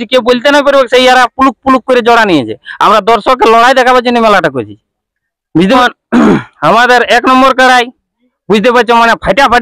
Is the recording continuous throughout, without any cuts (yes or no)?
no